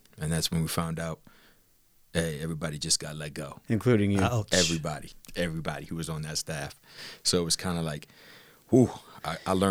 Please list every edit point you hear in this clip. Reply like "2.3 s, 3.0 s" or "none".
5.2 s